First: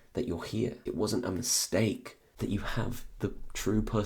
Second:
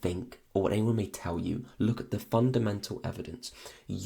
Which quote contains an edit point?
first; 2 cuts; at 0.8 s, 2.2 s

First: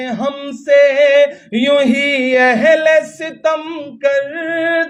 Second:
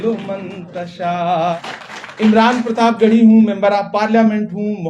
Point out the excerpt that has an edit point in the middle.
second; 1 cut; at 1.4 s

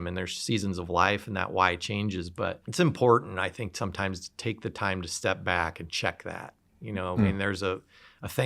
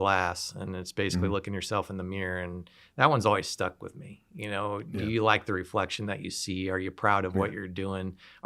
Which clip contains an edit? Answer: first; 1 cut; at 2.6 s

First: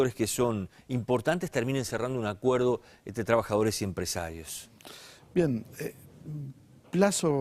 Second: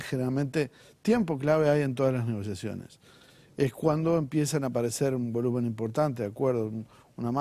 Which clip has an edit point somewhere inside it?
first; 1 cut; at 3.8 s

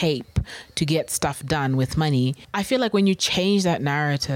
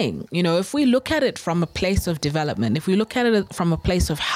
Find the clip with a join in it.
first; 1 cut; at 2.4 s

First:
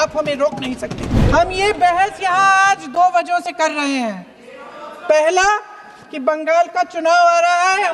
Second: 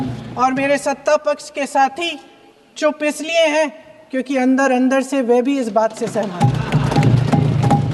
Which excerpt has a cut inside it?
first; 1 cut; at 1.1 s

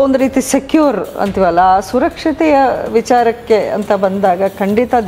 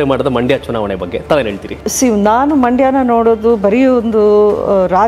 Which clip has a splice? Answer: second; 1 cut; at 1.8 s

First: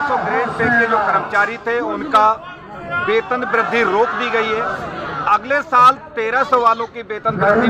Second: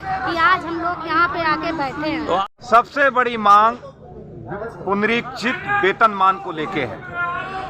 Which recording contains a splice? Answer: second; 1 cut; at 2.4 s

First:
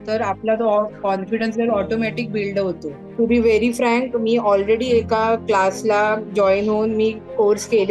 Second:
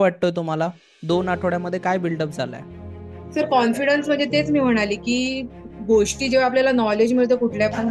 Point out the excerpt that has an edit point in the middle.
first; 1 cut; at 3.1 s

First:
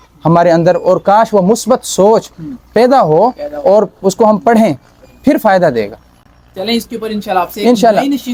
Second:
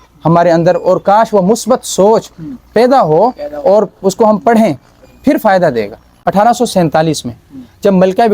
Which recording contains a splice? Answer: second; 1 cut; at 6.0 s

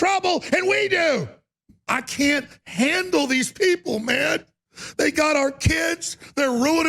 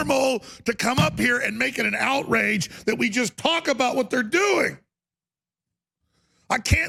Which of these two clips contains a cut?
first; 1 cut; at 1.8 s

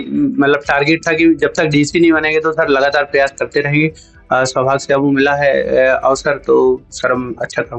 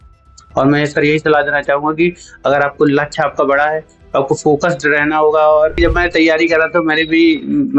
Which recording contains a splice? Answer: second; 1 cut; at 5.8 s

